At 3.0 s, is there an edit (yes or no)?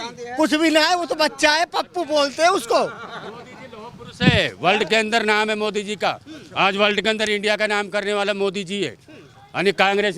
no